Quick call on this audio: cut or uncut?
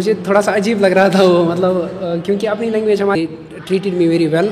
cut